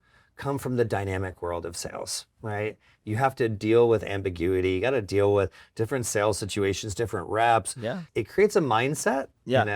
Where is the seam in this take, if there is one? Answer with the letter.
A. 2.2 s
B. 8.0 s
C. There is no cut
B